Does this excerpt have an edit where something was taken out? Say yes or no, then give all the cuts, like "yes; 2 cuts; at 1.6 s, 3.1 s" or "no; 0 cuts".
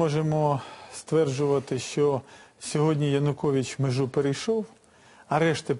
no; 0 cuts